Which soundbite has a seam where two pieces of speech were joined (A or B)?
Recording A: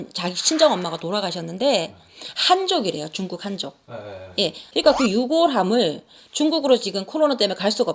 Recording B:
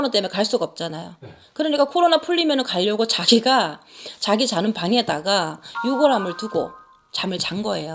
A